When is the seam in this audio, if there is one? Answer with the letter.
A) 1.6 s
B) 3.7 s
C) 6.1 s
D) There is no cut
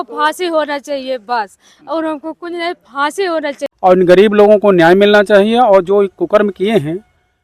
B